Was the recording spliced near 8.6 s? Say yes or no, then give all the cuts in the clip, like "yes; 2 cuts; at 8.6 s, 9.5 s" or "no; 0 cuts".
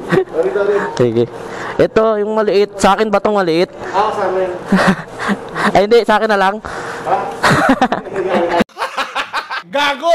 yes; 3 cuts; at 3.9 s, 7.4 s, 8.6 s